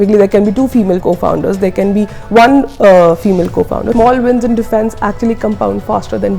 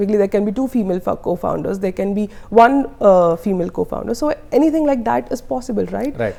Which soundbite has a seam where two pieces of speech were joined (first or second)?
first